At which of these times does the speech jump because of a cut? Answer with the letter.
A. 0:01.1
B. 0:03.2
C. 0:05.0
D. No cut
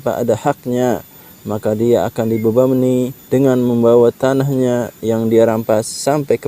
B